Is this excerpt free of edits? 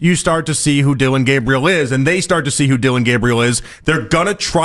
yes; 0 cuts

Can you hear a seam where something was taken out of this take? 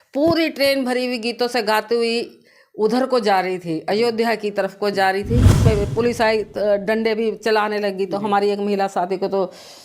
yes; 1 cut; at 5.6 s

